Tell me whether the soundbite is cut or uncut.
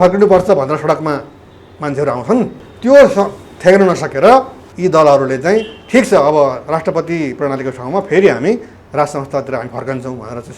cut